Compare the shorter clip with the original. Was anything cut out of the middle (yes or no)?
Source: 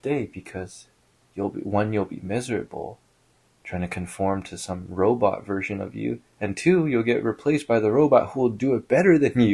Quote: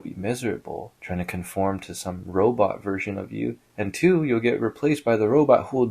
yes